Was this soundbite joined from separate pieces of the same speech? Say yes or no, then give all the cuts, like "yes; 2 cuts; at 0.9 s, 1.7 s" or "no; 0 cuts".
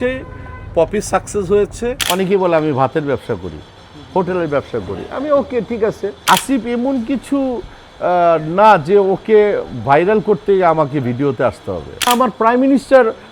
yes; 3 cuts; at 2.0 s, 6.2 s, 12.1 s